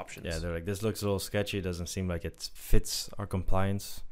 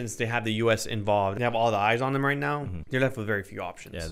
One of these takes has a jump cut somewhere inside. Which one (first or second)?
second